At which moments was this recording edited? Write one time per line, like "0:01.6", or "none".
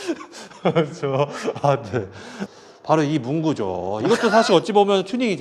0:02.4